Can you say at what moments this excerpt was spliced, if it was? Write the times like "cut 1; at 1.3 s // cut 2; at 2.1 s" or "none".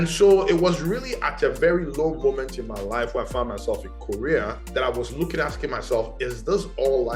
cut 1; at 4.6 s